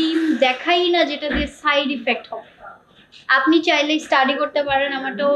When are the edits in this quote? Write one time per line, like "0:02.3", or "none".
none